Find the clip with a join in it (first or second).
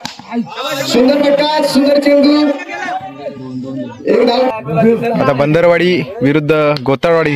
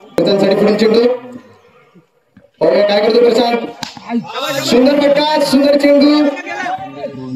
first